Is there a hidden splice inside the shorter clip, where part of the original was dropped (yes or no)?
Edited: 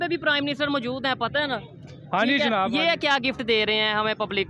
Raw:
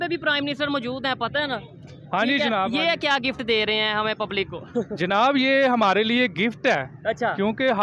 no